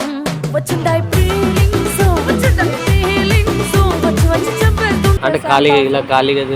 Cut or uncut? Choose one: cut